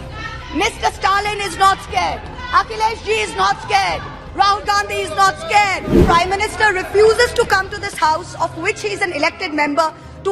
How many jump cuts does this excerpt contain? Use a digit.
1